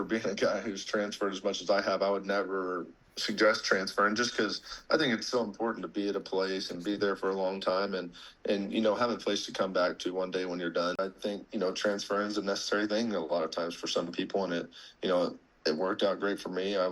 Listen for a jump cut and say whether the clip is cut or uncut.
cut